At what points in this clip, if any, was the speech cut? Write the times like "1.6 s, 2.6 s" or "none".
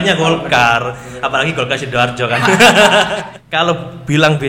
3.1 s

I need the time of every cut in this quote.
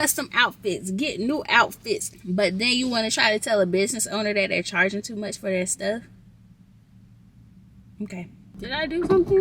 2.1 s, 8.5 s

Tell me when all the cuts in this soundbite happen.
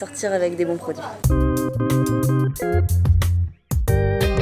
1.1 s

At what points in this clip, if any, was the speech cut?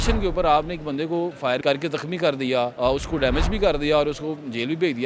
1.6 s, 2.7 s

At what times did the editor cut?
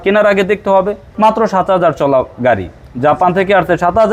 none

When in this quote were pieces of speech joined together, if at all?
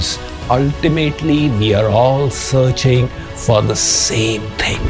none

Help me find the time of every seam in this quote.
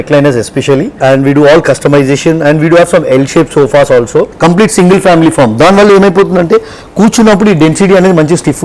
0.9 s, 4.3 s

